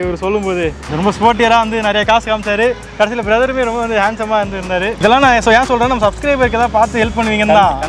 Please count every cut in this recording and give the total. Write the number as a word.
two